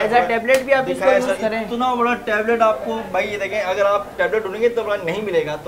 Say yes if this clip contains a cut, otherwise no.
no